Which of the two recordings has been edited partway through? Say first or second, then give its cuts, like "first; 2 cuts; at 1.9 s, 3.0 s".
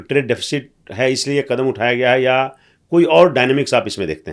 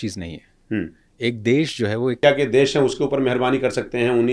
second; 1 cut; at 2.2 s